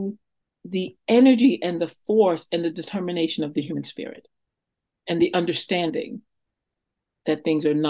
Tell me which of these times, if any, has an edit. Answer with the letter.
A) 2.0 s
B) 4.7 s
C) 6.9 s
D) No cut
B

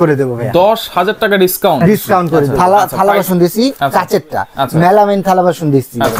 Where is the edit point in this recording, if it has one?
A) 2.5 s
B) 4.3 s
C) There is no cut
A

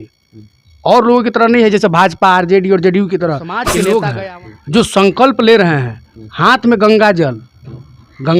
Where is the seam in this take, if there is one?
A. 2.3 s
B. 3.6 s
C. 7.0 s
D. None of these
B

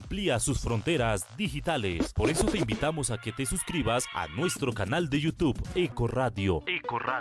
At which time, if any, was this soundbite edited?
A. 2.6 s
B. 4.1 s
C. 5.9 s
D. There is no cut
A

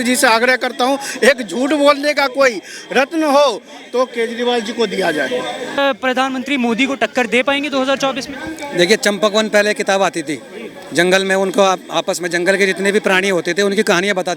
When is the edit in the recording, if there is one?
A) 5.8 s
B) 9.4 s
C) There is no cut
A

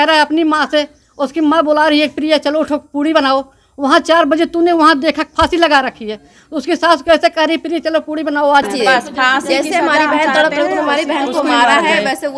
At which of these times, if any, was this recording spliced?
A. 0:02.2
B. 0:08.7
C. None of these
B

